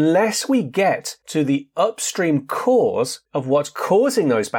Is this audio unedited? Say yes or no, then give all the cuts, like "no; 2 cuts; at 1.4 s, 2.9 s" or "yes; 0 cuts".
yes; 0 cuts